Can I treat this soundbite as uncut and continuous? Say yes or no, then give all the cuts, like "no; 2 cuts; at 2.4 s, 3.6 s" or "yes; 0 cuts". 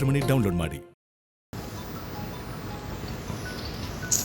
no; 1 cut; at 1.5 s